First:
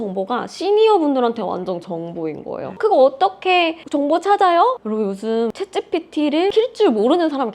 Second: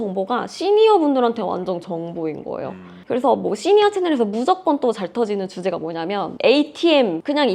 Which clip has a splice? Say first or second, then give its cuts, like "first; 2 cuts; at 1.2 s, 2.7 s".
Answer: first; 3 cuts; at 2.6 s, 5.5 s, 6.5 s